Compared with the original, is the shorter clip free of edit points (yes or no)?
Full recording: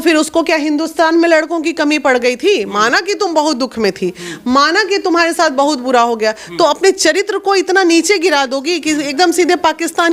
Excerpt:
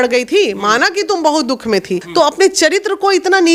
no